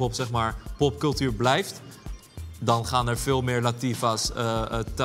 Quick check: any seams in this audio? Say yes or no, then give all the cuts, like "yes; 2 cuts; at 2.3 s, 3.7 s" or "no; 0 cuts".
no; 0 cuts